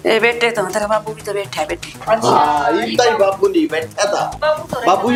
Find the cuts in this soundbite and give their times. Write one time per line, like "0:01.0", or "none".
none